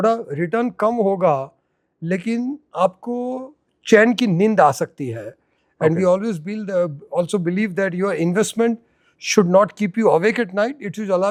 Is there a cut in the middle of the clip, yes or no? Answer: no